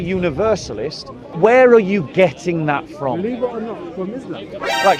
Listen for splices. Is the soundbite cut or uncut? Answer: cut